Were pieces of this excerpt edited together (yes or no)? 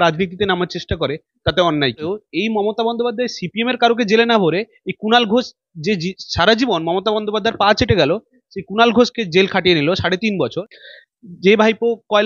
yes